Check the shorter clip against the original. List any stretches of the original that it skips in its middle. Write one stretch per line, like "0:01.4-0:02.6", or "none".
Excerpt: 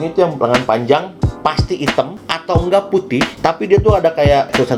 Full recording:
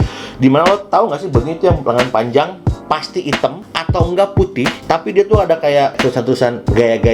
none